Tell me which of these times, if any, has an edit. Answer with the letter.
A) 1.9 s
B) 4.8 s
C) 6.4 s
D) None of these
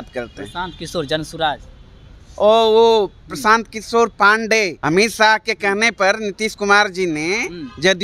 B